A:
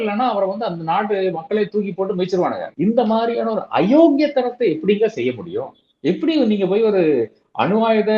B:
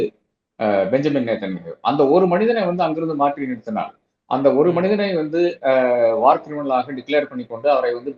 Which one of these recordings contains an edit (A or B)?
A